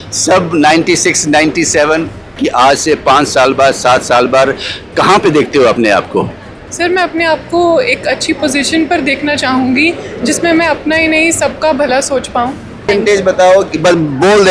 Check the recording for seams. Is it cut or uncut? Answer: cut